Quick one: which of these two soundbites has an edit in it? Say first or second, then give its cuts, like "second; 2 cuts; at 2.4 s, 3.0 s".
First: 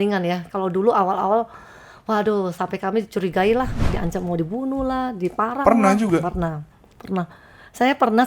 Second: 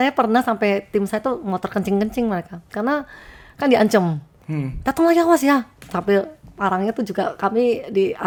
first; 1 cut; at 3.8 s